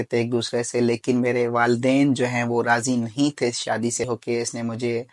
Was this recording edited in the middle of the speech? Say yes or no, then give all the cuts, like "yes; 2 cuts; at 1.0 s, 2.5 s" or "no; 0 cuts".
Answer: yes; 1 cut; at 4.1 s